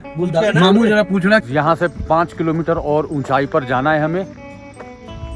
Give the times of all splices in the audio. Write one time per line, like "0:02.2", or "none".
0:01.4